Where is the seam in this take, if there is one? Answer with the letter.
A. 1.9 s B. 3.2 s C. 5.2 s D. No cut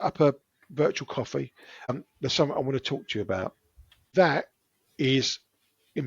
A